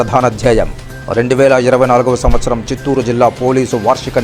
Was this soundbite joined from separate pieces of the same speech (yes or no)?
no